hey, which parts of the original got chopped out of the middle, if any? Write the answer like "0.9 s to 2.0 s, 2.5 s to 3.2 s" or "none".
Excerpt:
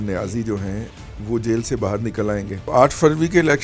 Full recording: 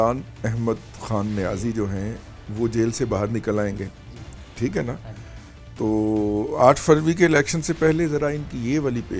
3.9 s to 6.5 s